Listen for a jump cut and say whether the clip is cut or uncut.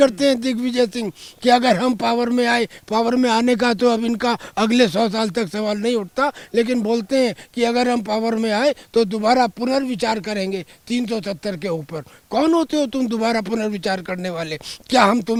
uncut